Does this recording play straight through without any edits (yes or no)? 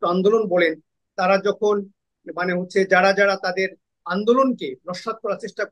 yes